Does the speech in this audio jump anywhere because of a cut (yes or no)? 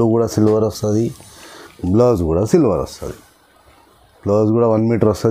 no